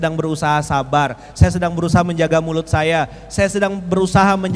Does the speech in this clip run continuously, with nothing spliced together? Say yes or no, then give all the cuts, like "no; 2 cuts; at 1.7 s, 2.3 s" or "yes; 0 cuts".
yes; 0 cuts